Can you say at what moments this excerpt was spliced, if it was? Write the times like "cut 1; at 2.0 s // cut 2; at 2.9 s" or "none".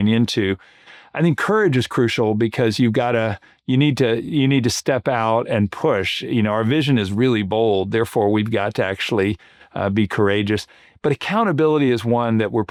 none